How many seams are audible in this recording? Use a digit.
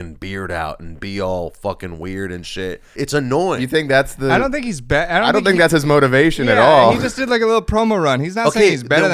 1